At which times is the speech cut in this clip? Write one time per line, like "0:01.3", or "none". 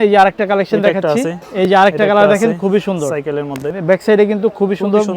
0:01.4
0:03.7

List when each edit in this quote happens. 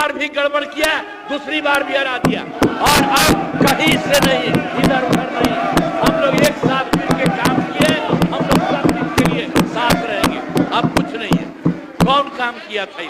none

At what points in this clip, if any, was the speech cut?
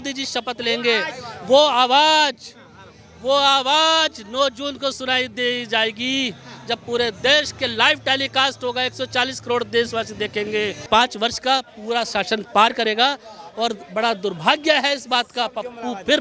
0:10.8

